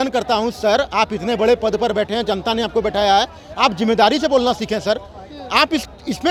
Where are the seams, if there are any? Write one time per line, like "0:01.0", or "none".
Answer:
none